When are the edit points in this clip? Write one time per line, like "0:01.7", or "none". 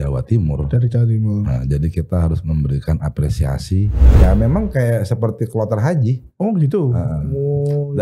0:04.2